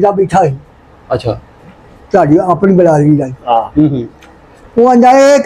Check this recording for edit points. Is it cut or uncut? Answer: uncut